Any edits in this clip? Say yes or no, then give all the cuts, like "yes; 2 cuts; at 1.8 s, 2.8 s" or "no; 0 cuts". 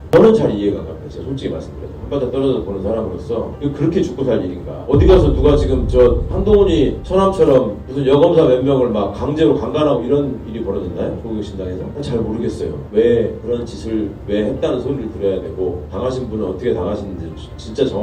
no; 0 cuts